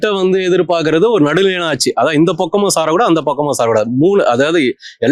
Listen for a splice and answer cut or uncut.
uncut